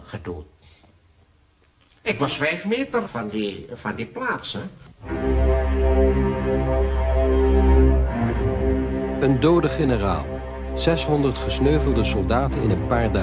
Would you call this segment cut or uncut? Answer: cut